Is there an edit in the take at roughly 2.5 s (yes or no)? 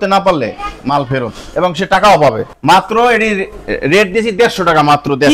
yes